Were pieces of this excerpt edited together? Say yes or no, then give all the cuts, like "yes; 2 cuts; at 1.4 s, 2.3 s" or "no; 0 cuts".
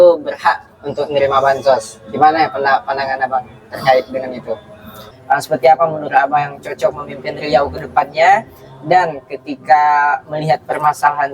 yes; 1 cut; at 5.1 s